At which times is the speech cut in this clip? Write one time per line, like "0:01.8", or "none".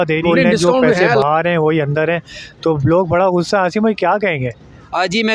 0:01.1